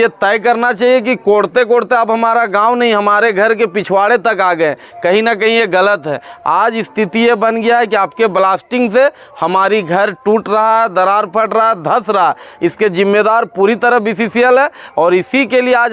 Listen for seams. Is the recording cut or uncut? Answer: uncut